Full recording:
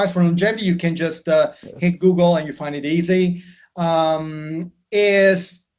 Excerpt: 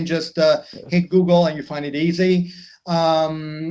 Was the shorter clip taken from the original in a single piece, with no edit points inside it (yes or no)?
yes